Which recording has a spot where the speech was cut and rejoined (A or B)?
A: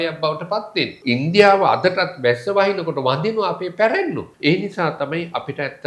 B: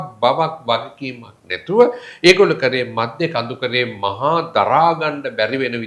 A